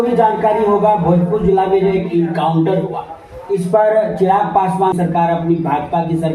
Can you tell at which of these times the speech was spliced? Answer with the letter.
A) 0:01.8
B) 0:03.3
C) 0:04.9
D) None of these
C